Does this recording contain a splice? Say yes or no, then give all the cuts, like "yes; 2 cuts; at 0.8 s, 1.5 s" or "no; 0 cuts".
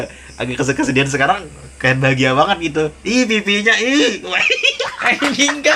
no; 0 cuts